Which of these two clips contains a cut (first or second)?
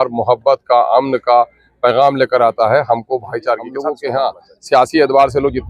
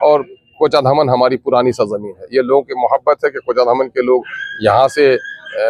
first